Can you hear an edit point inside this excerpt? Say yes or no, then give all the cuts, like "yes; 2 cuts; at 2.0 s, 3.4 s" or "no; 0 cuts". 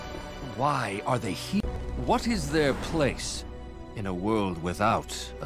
yes; 1 cut; at 1.8 s